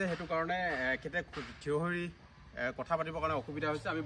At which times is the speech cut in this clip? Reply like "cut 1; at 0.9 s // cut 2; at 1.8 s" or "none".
none